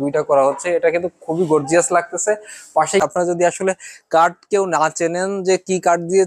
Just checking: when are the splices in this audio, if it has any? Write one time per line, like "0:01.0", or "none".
0:03.0